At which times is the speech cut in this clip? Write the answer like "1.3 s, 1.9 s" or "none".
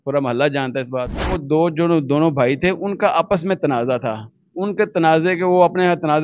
1.3 s